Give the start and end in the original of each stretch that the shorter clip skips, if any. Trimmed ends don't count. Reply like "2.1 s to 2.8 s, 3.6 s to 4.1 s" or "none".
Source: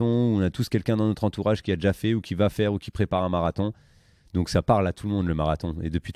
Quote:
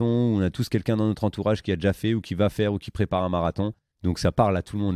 3.9 s to 4.2 s